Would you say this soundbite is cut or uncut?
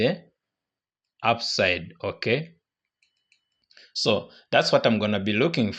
uncut